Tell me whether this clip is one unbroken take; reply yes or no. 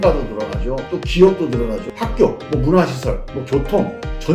no